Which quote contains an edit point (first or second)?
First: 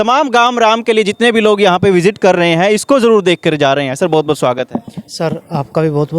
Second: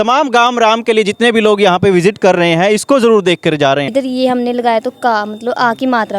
second